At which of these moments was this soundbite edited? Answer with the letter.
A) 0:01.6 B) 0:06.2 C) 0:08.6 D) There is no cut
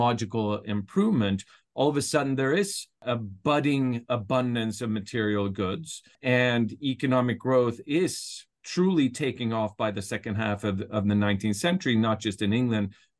B